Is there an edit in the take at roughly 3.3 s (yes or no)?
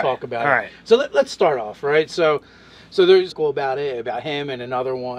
no